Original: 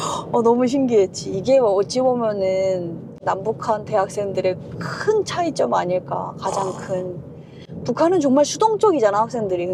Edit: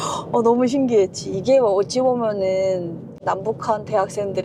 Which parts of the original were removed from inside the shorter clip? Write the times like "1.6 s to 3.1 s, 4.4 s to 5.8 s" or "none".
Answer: none